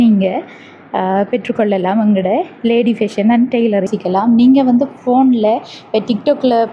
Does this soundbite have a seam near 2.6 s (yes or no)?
no